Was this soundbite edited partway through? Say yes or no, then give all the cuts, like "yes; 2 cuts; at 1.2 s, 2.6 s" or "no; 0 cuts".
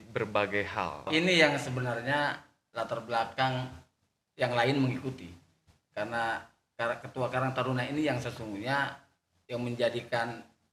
yes; 1 cut; at 1.1 s